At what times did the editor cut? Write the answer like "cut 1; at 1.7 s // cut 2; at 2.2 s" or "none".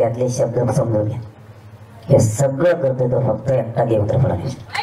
none